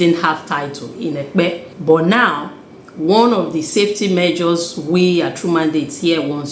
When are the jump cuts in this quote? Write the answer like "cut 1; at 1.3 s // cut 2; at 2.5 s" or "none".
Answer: cut 1; at 1.7 s

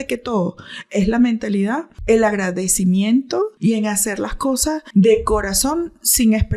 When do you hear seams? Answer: cut 1; at 1.9 s // cut 2; at 3.5 s // cut 3; at 4.8 s

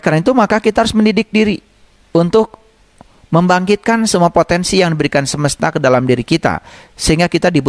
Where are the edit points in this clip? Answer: none

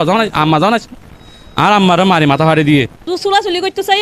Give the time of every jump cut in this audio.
cut 1; at 3.0 s

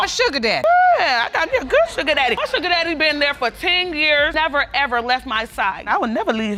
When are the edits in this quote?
none

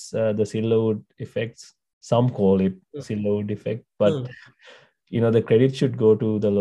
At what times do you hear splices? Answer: none

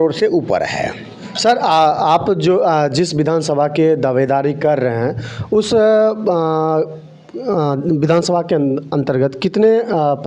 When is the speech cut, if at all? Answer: none

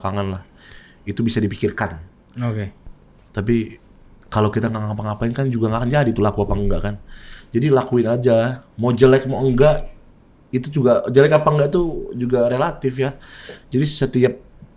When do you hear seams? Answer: none

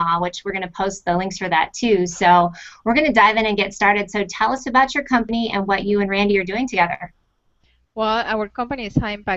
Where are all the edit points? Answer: none

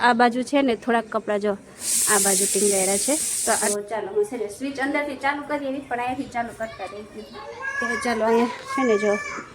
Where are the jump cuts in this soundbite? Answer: cut 1; at 3.6 s

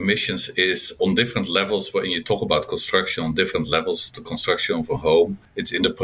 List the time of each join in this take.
none

